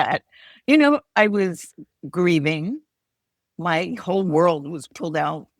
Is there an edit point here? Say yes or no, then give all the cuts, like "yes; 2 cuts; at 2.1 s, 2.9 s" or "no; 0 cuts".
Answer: no; 0 cuts